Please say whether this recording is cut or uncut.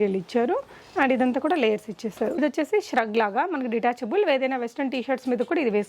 cut